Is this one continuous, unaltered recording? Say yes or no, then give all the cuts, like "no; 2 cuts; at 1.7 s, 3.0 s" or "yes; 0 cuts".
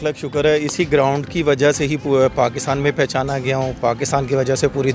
yes; 0 cuts